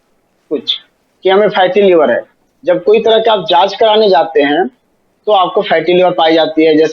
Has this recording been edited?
no; 0 cuts

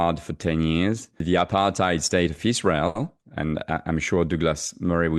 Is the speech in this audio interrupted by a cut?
yes; 1 cut; at 1.2 s

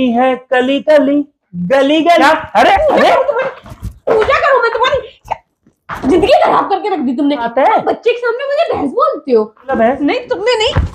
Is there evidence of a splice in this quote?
yes; 3 cuts; at 2.2 s, 7.5 s, 9.7 s

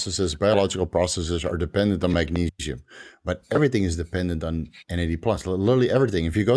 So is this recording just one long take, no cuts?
yes; 0 cuts

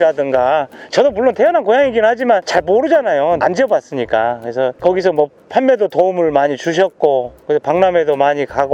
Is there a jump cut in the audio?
no; 0 cuts

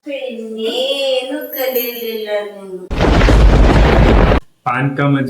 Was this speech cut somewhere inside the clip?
yes; 1 cut; at 4.4 s

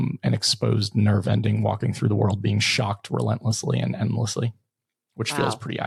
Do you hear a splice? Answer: no; 0 cuts

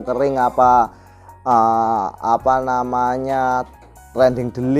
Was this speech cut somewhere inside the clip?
no; 0 cuts

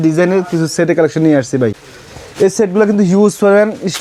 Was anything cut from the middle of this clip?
no; 0 cuts

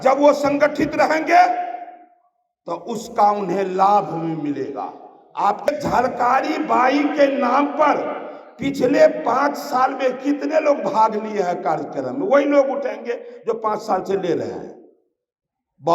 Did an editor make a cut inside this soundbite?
yes; 1 cut; at 5.8 s

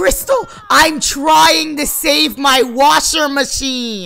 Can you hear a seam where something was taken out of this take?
no; 0 cuts

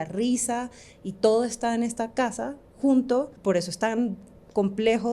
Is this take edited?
yes; 1 cut; at 3.3 s

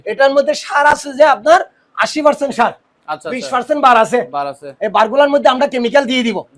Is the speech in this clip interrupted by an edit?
no; 0 cuts

